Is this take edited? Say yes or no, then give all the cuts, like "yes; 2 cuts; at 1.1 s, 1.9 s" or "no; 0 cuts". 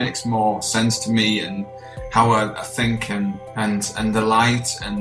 no; 0 cuts